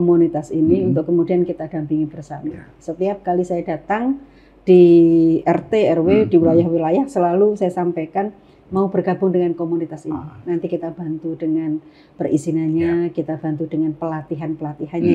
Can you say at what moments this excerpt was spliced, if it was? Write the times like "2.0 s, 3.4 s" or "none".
none